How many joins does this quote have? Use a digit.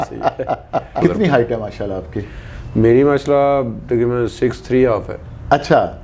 1